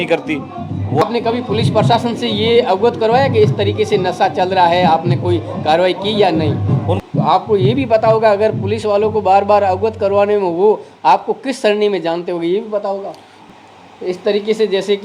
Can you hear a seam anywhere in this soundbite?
yes; 3 cuts; at 1.0 s, 6.9 s, 13.3 s

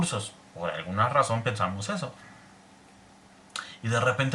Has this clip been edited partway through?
no; 0 cuts

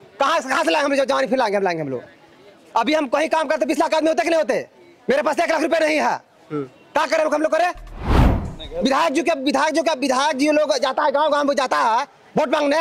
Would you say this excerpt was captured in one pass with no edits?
yes; 0 cuts

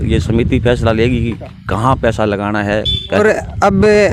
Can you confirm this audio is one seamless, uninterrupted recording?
yes; 0 cuts

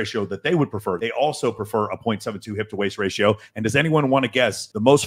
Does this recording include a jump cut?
yes; 1 cut; at 1.0 s

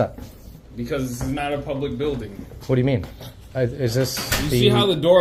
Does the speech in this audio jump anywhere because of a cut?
no; 0 cuts

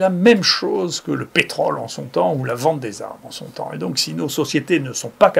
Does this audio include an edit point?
no; 0 cuts

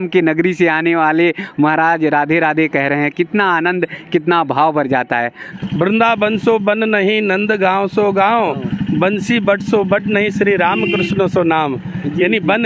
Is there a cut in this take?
yes; 1 cut; at 5.4 s

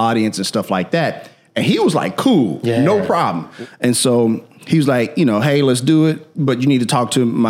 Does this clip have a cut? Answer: yes; 1 cut; at 3.5 s

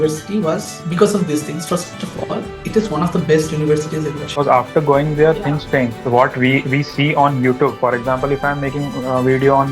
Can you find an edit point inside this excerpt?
yes; 1 cut; at 4.3 s

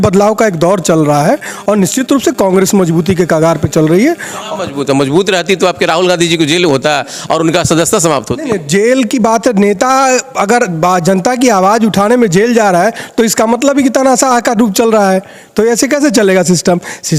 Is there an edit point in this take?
no; 0 cuts

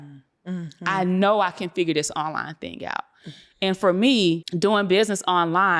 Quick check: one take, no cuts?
no; 1 cut; at 4.5 s

